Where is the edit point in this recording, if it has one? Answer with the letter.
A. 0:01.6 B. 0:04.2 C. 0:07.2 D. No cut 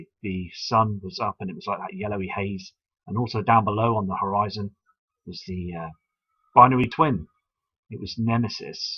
A